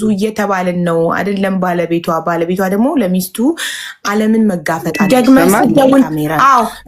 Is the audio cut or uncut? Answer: cut